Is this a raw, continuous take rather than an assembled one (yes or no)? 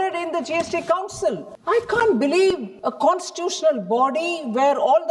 no